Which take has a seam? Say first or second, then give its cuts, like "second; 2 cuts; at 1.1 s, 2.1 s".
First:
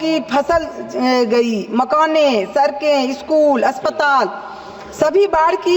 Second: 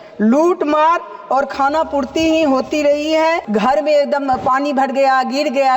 second; 1 cut; at 3.4 s